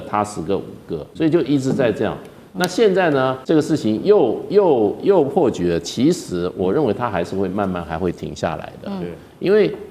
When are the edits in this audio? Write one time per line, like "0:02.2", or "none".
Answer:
0:01.0
0:03.4